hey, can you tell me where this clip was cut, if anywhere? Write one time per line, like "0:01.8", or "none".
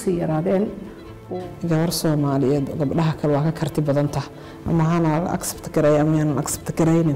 0:01.2